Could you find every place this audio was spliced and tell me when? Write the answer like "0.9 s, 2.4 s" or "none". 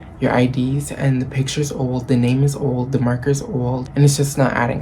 3.9 s